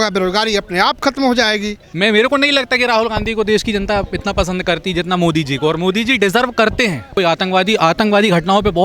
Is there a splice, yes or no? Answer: yes